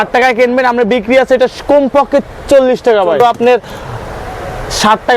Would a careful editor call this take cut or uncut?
cut